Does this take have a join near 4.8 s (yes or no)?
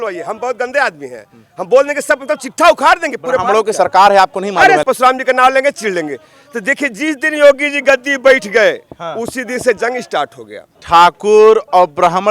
yes